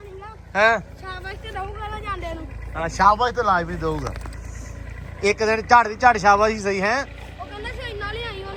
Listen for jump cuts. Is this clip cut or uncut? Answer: uncut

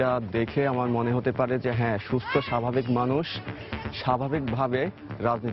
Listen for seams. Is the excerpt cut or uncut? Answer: uncut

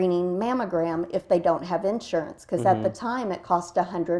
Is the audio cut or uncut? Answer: uncut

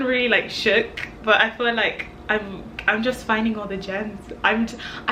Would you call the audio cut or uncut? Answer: uncut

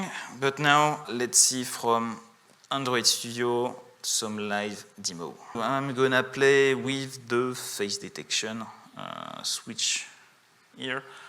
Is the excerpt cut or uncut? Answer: cut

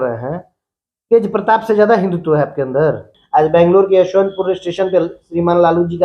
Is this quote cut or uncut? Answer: cut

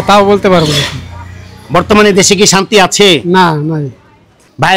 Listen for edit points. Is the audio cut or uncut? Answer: uncut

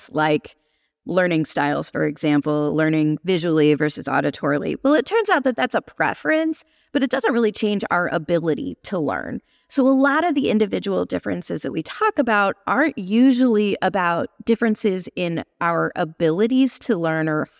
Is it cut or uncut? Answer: uncut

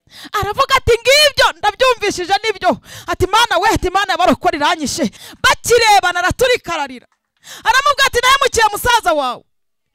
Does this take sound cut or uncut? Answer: cut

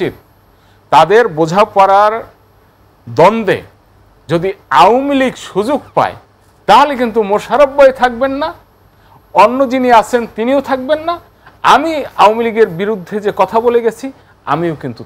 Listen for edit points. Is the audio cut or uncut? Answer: uncut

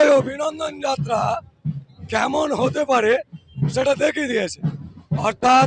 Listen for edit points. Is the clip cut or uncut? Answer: uncut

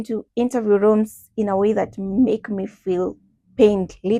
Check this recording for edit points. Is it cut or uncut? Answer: uncut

